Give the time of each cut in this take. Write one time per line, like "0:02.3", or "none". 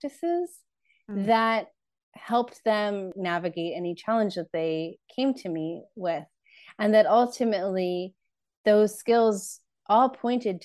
0:03.2